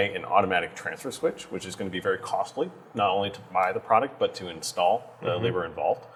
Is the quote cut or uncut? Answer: uncut